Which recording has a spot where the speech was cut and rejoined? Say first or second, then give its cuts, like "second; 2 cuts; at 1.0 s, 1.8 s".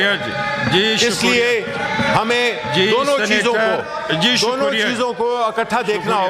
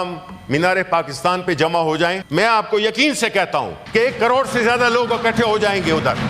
second; 2 cuts; at 2.2 s, 3.8 s